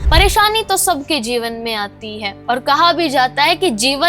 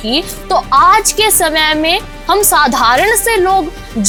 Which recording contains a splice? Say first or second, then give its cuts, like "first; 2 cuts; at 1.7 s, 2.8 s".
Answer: first; 1 cut; at 2.3 s